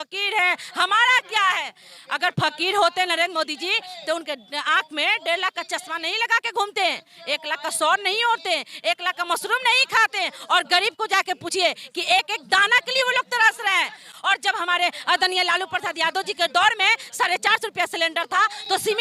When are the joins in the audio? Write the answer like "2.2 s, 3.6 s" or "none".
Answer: none